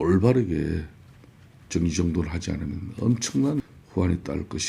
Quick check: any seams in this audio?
yes; 1 cut; at 3.6 s

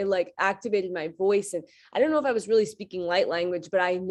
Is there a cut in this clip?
no; 0 cuts

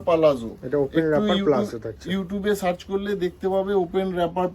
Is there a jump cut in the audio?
no; 0 cuts

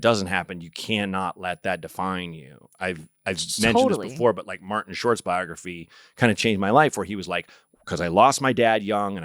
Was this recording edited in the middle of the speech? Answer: no; 0 cuts

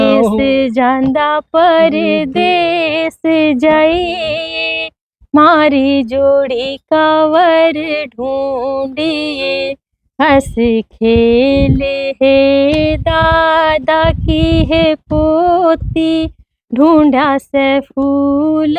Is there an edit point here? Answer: no; 0 cuts

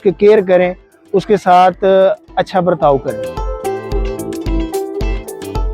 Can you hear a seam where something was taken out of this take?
yes; 1 cut; at 3.2 s

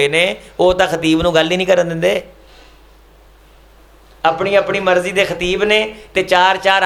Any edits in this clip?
no; 0 cuts

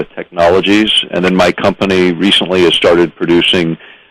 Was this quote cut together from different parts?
no; 0 cuts

